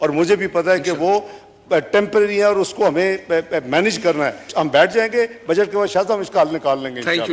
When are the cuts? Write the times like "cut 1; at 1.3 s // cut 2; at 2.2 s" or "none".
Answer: cut 1; at 4.4 s